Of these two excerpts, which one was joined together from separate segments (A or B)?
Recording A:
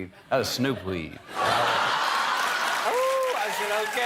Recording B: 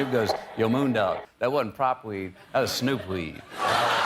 A